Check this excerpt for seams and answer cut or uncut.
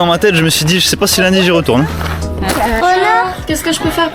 cut